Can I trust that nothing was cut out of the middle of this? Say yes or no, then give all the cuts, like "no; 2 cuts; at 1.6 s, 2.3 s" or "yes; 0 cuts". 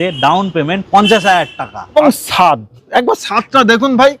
no; 1 cut; at 1.9 s